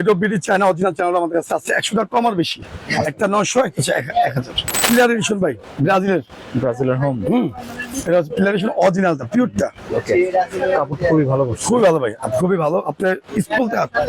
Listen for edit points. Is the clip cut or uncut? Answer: cut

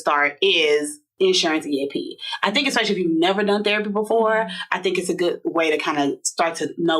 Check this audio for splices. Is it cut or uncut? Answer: cut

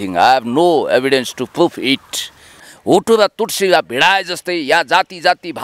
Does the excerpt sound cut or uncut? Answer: cut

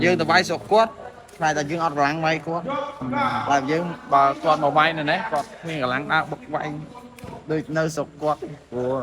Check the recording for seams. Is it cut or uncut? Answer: uncut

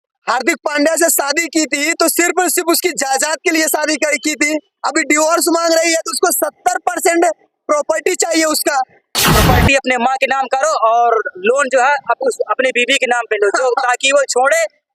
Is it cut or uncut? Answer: cut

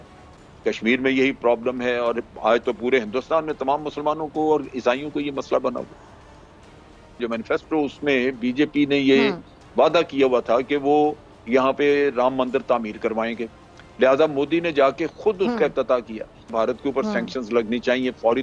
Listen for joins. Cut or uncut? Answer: cut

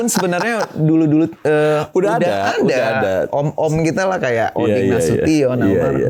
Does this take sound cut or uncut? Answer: uncut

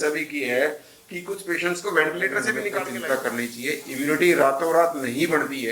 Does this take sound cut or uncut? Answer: cut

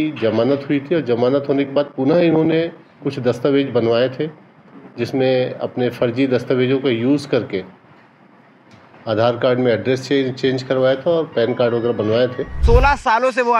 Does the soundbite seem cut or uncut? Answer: cut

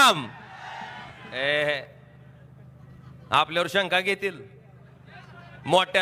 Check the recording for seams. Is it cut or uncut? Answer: uncut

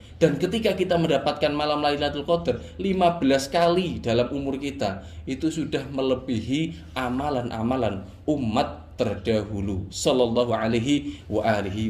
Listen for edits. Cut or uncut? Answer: uncut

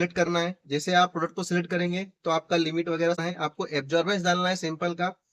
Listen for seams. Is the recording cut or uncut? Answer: cut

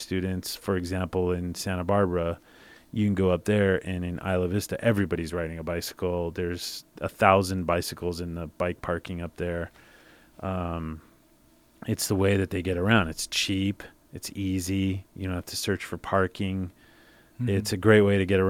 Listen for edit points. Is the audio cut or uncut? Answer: uncut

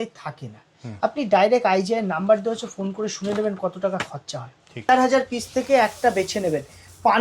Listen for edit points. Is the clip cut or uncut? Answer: cut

